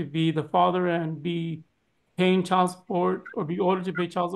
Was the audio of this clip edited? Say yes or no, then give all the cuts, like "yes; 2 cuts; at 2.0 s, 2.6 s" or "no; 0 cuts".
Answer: no; 0 cuts